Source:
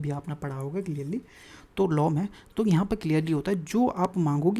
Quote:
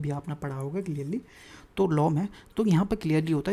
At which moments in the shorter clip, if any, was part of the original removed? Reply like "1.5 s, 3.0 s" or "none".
none